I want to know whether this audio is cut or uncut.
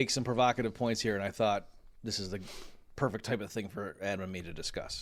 uncut